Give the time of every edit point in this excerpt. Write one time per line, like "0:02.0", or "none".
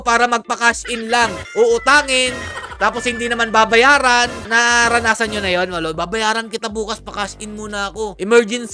none